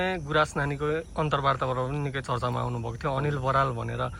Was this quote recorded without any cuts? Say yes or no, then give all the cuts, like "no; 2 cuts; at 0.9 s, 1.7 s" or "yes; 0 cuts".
yes; 0 cuts